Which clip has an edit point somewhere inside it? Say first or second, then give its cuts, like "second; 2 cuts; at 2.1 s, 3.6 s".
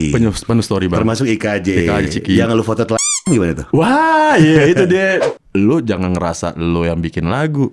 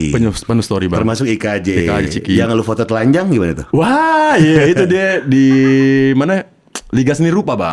first; 1 cut; at 5.2 s